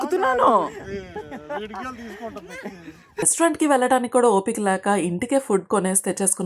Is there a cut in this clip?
yes; 1 cut; at 3.3 s

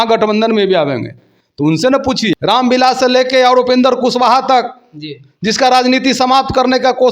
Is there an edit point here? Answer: yes; 1 cut; at 2.4 s

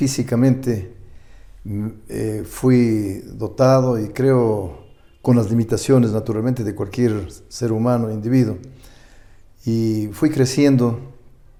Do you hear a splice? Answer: no; 0 cuts

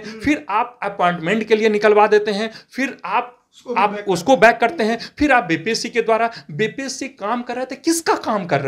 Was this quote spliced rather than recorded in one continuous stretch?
no; 0 cuts

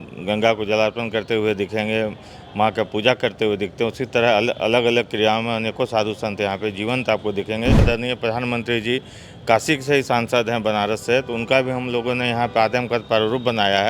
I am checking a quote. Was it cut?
yes; 1 cut; at 7.8 s

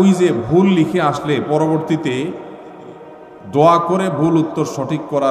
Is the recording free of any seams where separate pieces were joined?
yes; 0 cuts

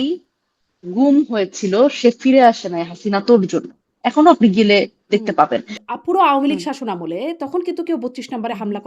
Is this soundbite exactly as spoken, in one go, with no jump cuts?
no; 1 cut; at 5.8 s

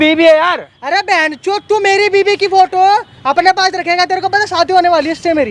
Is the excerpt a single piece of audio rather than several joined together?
yes; 0 cuts

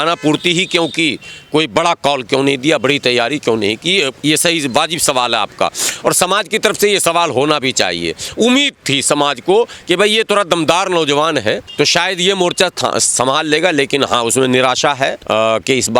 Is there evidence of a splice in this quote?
yes; 2 cuts; at 11.7 s, 15.2 s

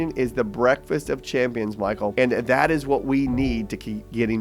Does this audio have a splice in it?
yes; 1 cut; at 2.1 s

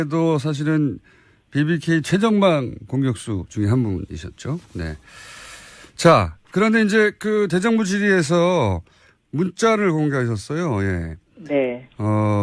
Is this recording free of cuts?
yes; 0 cuts

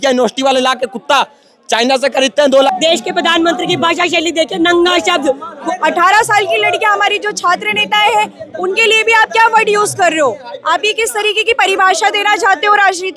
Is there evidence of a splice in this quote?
yes; 2 cuts; at 2.7 s, 5.6 s

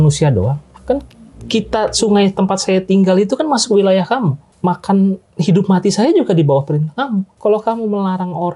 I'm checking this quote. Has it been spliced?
yes; 2 cuts; at 4.4 s, 7.3 s

